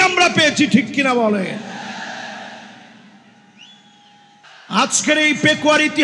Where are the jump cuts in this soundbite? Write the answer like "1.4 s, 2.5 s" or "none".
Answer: 4.4 s